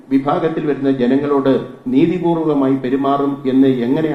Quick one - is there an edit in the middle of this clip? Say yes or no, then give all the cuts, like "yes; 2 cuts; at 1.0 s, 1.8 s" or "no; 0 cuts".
no; 0 cuts